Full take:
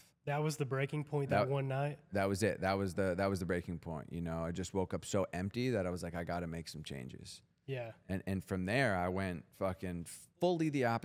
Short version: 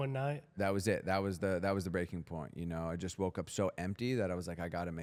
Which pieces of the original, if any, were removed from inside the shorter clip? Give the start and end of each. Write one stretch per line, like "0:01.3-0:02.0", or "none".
none